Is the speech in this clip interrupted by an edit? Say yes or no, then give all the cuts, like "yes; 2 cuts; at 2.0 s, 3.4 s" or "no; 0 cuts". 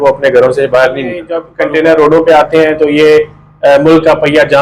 yes; 1 cut; at 1.4 s